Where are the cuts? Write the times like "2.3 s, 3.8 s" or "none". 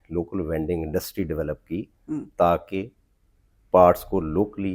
none